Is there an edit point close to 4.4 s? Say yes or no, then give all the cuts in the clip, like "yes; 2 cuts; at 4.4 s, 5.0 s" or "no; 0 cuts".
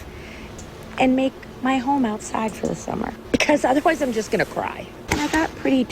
no; 1 cut; at 1.7 s